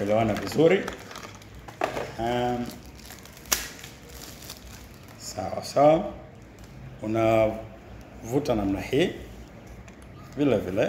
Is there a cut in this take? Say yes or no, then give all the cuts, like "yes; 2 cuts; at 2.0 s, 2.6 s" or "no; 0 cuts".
no; 0 cuts